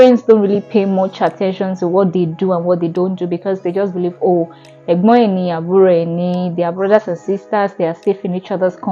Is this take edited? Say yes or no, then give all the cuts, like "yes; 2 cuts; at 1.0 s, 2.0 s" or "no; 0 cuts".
no; 0 cuts